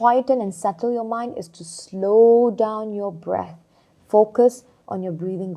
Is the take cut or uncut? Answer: uncut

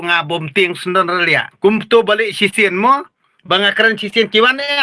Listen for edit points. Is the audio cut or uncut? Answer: cut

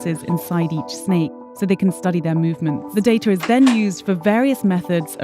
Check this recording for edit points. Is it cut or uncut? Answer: cut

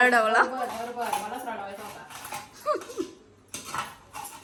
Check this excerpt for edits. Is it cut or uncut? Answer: uncut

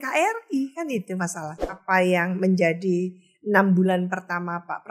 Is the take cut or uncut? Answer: cut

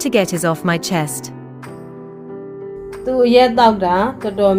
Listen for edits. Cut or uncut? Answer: cut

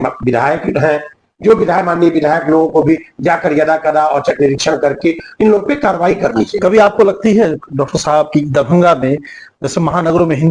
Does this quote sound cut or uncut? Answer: uncut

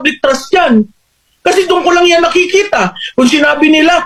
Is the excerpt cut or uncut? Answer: uncut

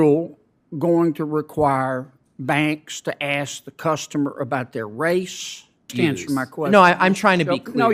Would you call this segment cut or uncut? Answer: cut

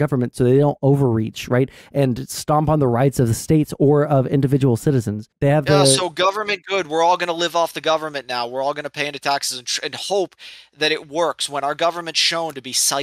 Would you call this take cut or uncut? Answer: cut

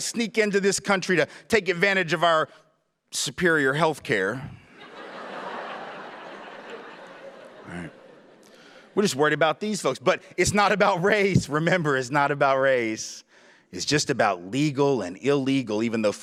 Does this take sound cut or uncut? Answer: uncut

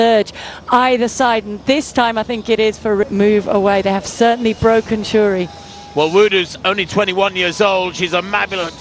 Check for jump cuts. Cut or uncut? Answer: cut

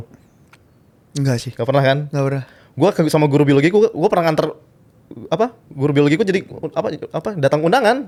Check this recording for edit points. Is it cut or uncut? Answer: uncut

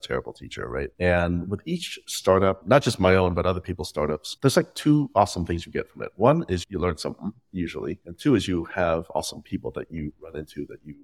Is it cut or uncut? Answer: cut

